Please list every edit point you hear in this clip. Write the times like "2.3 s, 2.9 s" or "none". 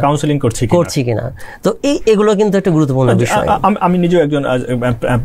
none